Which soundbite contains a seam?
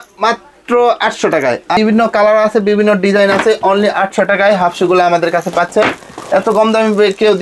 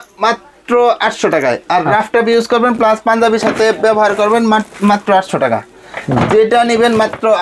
first; 1 cut; at 1.8 s

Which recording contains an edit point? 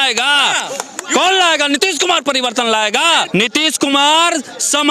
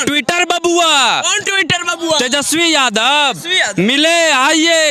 first; 1 cut; at 3.3 s

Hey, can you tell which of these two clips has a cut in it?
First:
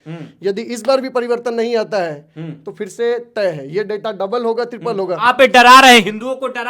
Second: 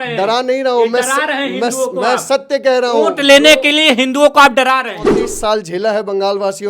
second; 1 cut; at 5.0 s

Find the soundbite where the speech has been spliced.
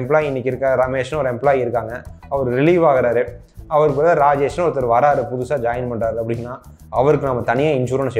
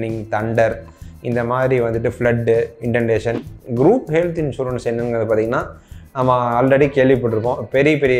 second; 1 cut; at 3.5 s

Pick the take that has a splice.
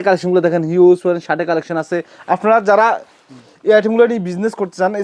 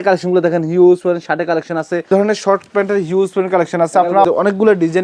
second; 2 cuts; at 2.1 s, 4.2 s

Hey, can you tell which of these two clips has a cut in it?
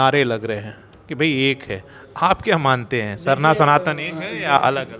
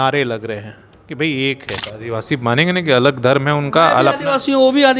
second; 1 cut; at 1.9 s

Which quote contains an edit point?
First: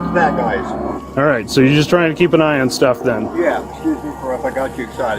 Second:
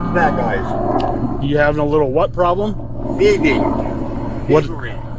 first; 2 cuts; at 0.9 s, 3.6 s

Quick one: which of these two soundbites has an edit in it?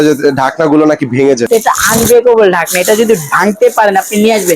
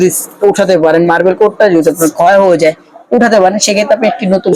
first; 1 cut; at 1.5 s

